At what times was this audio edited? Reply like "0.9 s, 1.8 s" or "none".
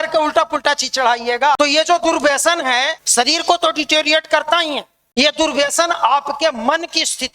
1.6 s, 3.0 s, 4.9 s